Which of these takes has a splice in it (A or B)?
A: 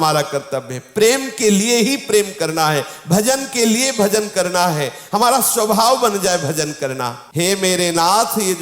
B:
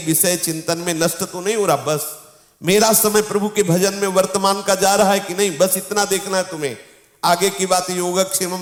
A